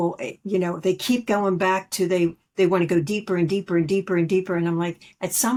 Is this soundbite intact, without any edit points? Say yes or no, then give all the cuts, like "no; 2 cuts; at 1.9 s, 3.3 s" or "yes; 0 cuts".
yes; 0 cuts